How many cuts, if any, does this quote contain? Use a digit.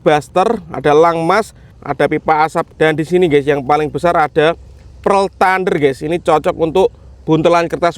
2